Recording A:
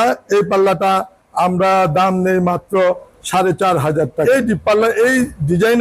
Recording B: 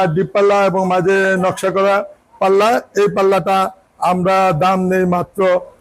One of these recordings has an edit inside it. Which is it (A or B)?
A